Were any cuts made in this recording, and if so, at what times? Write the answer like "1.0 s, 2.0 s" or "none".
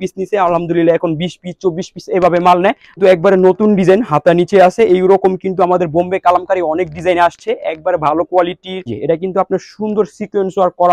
3.0 s, 9.0 s